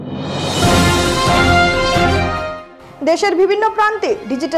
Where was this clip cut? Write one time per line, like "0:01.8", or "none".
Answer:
0:02.6